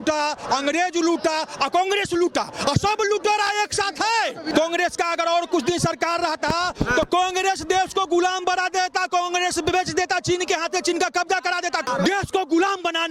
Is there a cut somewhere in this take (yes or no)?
yes